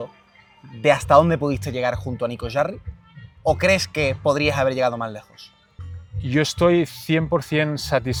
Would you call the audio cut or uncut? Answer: uncut